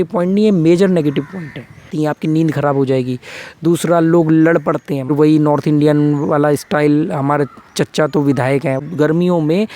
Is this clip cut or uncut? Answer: cut